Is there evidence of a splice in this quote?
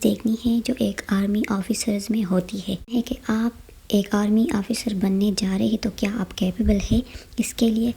no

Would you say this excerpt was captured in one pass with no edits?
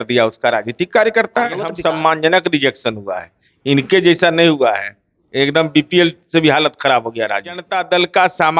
no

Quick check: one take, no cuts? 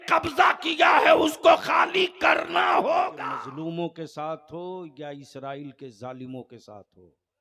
no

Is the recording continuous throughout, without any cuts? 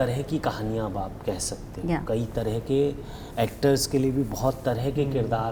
yes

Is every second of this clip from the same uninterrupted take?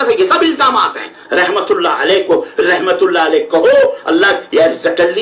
no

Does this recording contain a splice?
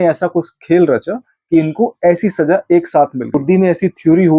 yes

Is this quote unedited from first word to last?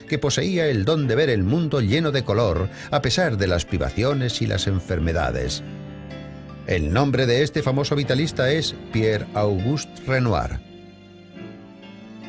yes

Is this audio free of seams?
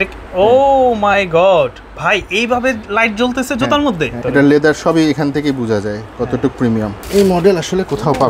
no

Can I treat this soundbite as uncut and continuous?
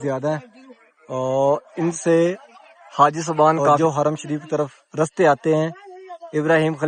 no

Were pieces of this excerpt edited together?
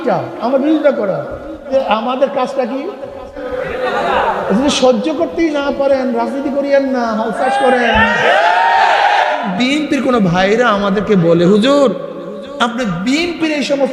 yes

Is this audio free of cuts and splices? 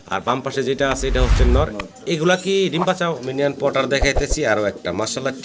no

